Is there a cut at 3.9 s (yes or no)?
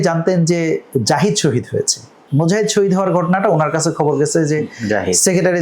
no